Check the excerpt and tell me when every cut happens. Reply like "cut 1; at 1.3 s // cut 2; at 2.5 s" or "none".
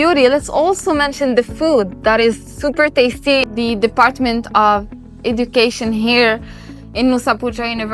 cut 1; at 3.5 s